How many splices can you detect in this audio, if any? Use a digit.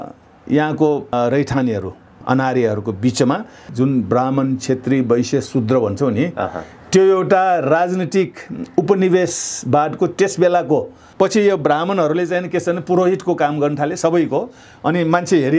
4